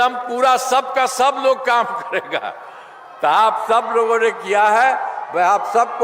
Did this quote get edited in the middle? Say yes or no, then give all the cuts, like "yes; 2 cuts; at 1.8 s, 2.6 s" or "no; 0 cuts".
no; 0 cuts